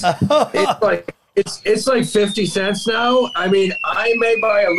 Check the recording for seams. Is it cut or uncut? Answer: uncut